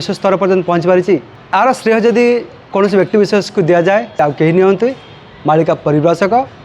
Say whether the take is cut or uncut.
cut